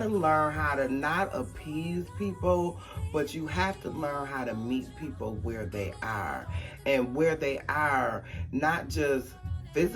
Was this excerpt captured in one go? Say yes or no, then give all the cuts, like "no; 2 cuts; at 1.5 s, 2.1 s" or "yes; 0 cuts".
yes; 0 cuts